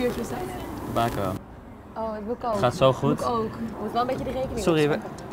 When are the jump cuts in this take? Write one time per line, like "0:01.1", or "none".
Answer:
0:03.7